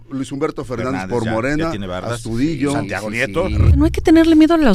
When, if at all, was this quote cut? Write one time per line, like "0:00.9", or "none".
0:03.8